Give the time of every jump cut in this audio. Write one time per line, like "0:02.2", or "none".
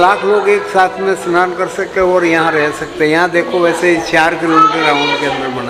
none